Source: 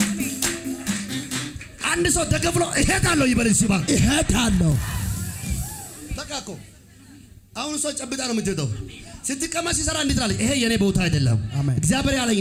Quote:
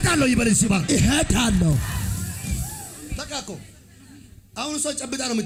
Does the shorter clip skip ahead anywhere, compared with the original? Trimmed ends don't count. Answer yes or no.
no